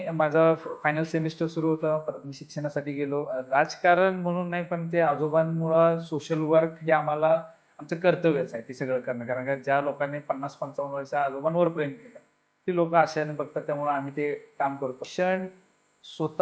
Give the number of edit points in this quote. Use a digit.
2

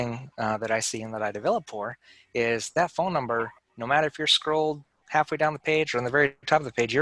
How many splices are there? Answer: 0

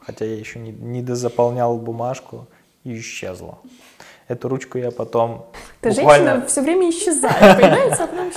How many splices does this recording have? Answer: 0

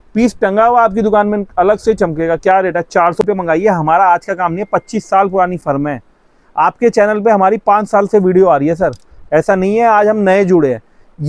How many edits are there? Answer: 1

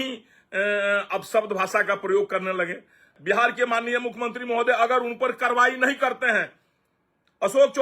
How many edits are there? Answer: 1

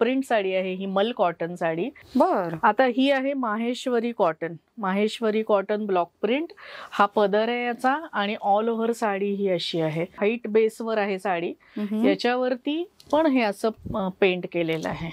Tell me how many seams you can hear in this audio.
2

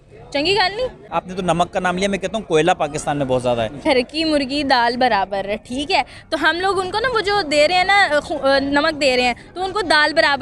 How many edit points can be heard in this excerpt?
2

